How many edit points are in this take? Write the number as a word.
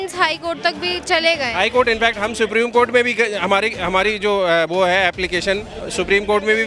zero